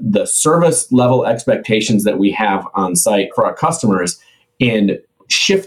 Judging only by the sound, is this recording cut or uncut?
cut